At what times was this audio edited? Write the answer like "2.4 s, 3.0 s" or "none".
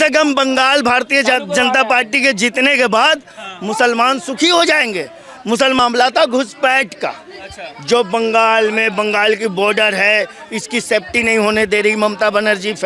5.8 s